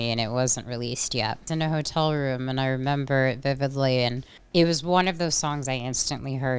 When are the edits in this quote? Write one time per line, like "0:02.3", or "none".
0:04.3